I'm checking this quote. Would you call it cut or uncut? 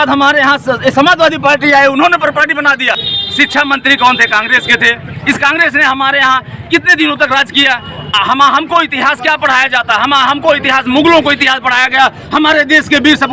cut